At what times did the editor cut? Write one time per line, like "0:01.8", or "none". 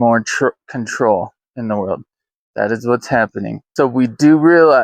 0:03.6